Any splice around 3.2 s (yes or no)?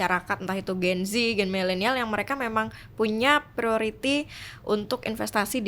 no